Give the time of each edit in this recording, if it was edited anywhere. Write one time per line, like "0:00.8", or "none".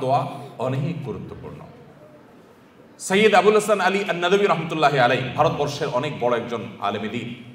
none